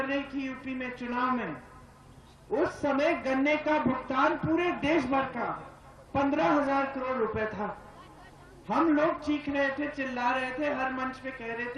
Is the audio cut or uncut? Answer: uncut